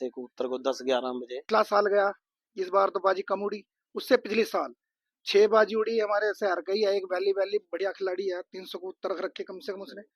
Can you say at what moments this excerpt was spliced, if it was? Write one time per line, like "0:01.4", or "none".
0:01.5